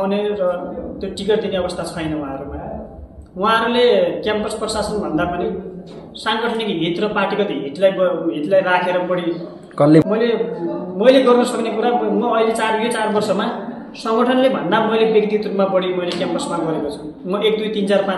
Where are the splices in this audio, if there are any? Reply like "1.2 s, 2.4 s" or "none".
10.0 s